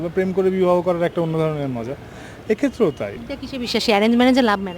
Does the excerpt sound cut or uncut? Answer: cut